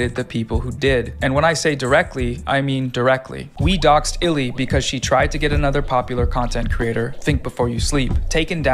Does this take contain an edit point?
yes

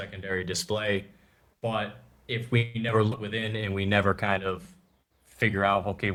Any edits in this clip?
no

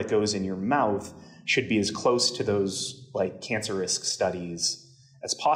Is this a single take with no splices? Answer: yes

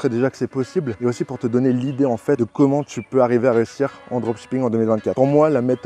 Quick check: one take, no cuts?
no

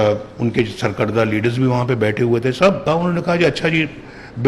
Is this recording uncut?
no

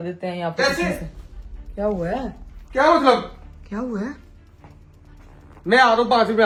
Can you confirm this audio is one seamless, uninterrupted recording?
yes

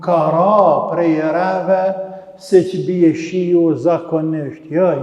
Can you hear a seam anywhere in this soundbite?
no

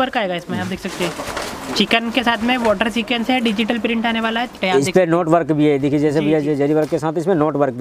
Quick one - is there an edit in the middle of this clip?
yes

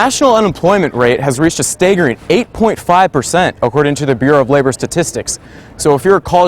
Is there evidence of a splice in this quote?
no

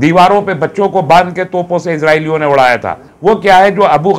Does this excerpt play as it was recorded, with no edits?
no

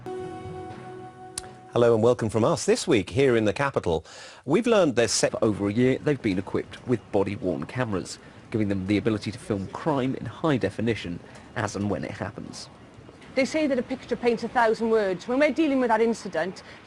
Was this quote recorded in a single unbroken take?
yes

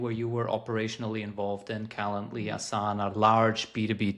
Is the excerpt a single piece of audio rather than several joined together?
yes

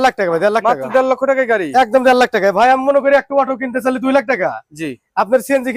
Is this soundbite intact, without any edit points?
yes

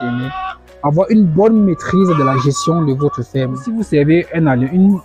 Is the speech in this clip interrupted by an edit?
yes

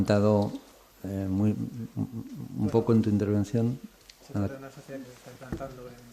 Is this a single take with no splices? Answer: no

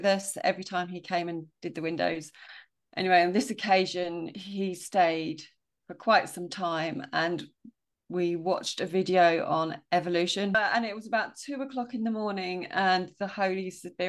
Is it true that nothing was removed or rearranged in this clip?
no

